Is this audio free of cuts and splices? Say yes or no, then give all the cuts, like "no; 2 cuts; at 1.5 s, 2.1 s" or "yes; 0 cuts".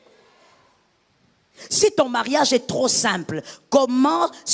yes; 0 cuts